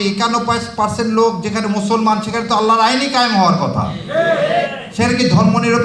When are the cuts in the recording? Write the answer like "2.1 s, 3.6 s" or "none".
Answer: none